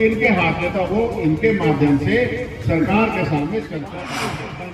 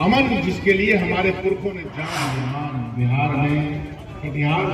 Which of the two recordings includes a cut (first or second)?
second